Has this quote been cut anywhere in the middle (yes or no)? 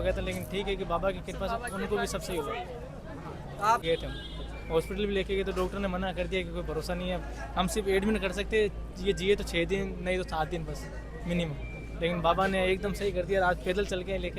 yes